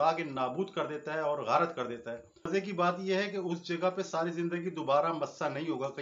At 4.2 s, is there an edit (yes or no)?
no